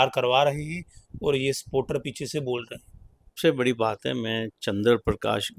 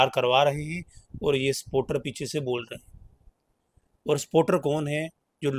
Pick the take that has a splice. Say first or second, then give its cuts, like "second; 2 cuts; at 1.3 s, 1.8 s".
first; 1 cut; at 3.4 s